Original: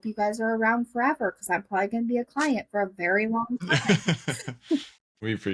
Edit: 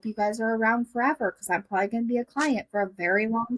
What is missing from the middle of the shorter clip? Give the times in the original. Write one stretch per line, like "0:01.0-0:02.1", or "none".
none